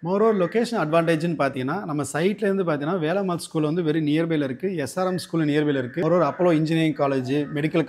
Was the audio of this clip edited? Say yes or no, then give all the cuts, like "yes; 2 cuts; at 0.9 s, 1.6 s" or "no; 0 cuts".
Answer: no; 0 cuts